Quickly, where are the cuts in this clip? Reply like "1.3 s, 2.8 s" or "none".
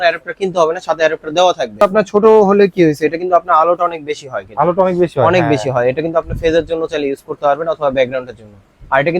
1.8 s